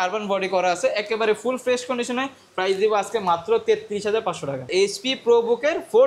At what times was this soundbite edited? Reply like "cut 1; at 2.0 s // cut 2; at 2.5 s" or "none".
cut 1; at 4.7 s